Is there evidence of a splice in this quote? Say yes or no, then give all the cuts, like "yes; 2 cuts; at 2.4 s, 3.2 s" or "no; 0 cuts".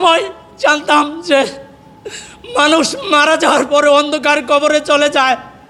no; 0 cuts